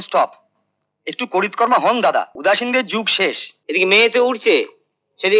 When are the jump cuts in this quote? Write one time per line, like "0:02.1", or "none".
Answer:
0:02.3
0:03.5

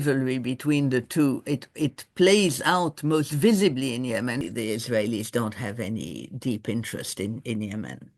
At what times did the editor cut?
0:04.4

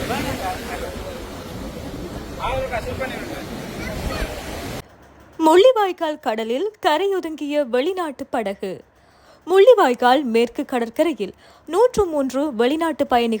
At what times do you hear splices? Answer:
0:04.8

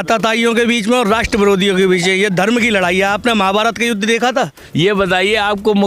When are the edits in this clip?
0:04.6

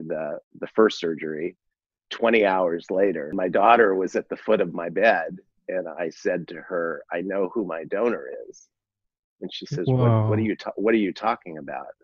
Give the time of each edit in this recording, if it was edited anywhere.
0:03.4

